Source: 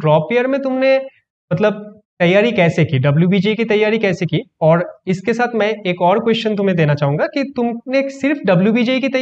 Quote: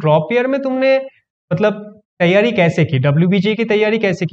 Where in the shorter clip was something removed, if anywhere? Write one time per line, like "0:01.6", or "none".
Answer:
none